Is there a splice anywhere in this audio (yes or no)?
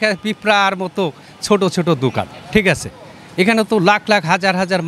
no